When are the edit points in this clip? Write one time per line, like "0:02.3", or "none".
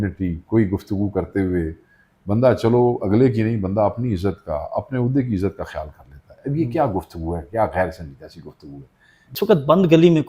0:09.4

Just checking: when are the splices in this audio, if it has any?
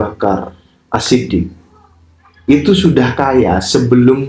none

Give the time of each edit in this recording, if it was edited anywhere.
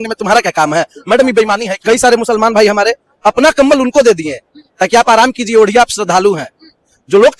0:01.7

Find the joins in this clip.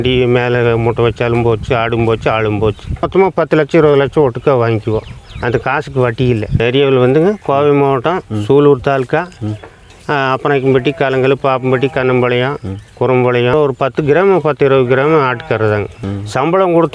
0:03.1
0:06.6
0:13.5
0:16.0

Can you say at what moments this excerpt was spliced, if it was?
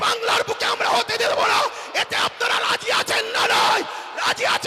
none

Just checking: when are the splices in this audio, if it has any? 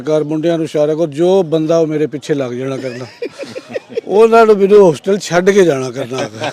none

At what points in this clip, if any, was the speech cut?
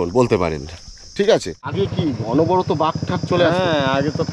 0:01.7

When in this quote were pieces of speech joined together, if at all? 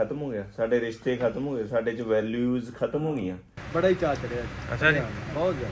0:03.5

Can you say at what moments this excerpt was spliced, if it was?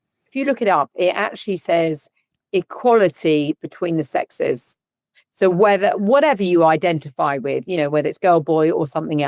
none

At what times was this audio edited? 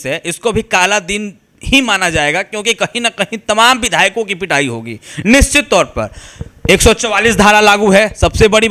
none

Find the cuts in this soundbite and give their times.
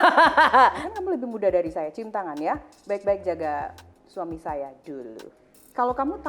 0:00.9
0:05.3

